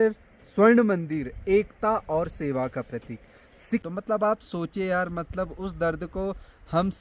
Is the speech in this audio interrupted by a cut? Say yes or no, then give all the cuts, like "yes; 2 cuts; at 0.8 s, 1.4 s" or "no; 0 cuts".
yes; 1 cut; at 3.8 s